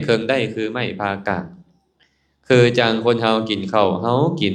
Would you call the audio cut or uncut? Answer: uncut